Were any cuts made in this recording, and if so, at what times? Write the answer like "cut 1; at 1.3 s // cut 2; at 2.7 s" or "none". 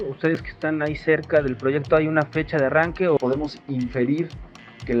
cut 1; at 3.2 s